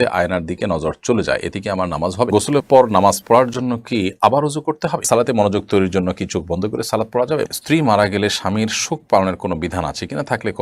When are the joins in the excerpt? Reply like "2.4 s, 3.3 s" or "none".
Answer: 2.3 s, 5.0 s, 7.5 s

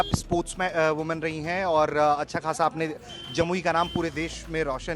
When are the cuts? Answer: none

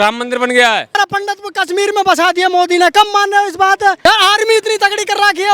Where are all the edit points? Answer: 0.9 s, 4.0 s

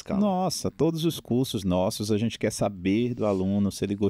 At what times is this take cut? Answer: none

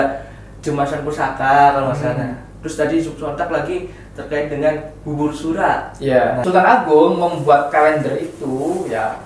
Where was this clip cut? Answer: 6.4 s

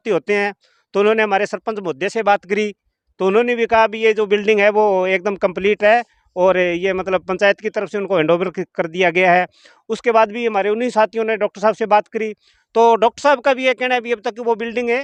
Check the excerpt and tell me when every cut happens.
none

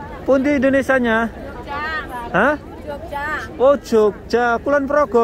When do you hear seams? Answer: none

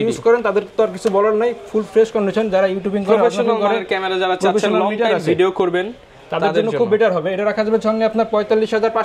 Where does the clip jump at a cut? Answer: none

